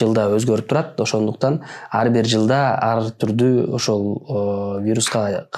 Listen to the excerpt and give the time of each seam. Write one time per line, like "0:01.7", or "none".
none